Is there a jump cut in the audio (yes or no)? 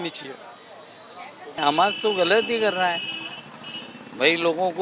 yes